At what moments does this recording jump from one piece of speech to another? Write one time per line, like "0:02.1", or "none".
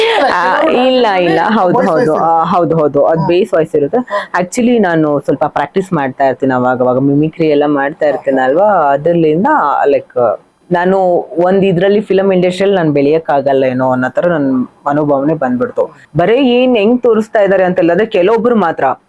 0:10.5
0:16.0